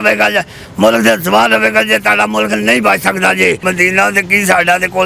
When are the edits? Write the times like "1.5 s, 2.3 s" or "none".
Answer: 3.6 s